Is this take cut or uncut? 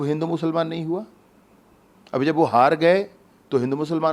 uncut